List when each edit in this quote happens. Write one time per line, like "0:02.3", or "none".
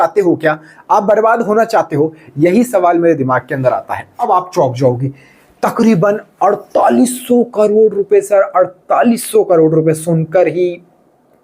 0:04.1